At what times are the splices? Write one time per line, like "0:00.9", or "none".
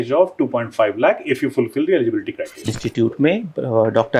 0:02.7